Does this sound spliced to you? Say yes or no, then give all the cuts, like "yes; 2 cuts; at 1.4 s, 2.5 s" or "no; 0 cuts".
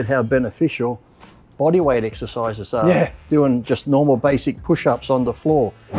no; 0 cuts